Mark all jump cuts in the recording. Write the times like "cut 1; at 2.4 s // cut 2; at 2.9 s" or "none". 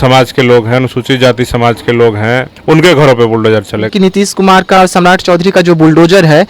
cut 1; at 2.5 s // cut 2; at 3.9 s